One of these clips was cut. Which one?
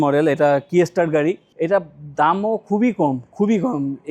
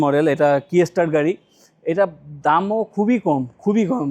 first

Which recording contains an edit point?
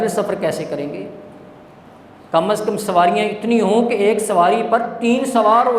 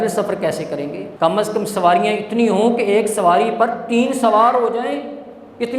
second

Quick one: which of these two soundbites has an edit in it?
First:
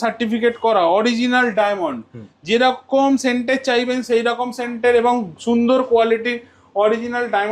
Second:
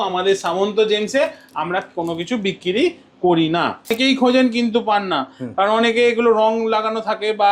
second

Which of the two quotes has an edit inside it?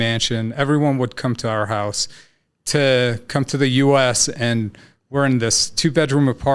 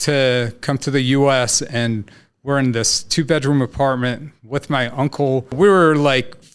second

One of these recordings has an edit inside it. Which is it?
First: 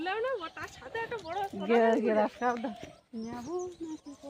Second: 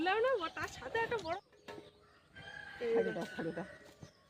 second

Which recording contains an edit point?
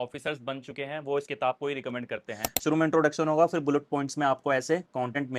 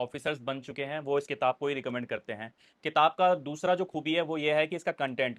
first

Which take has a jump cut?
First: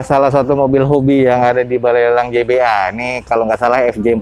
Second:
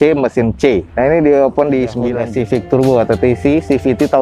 second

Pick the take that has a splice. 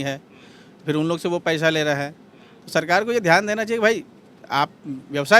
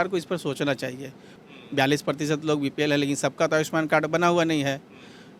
second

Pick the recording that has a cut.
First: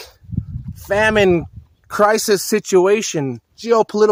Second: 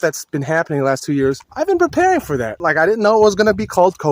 second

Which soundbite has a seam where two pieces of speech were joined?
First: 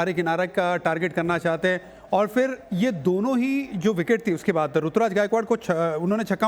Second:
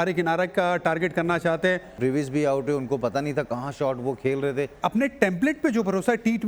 second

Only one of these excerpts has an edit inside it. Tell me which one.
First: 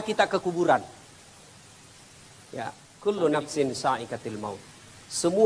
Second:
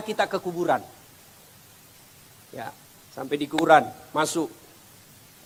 first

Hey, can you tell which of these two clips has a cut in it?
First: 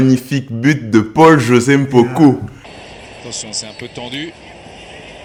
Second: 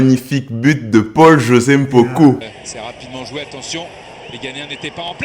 second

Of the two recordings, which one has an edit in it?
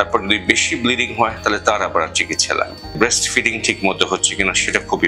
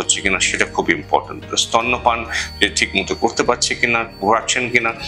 first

